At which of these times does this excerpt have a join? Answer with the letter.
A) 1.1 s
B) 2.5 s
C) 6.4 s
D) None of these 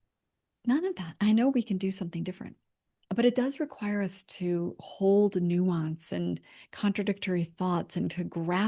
A